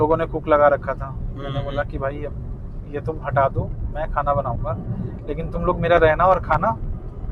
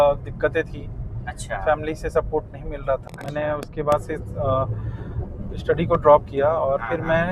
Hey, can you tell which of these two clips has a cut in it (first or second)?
second